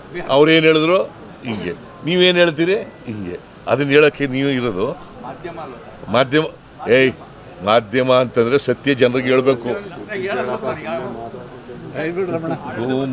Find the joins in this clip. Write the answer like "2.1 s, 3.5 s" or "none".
none